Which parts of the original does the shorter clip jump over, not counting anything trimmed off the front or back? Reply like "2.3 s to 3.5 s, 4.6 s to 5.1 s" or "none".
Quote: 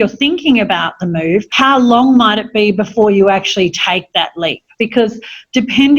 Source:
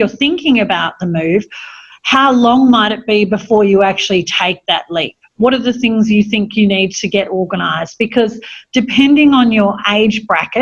1.5 s to 2.0 s, 5.2 s to 7.9 s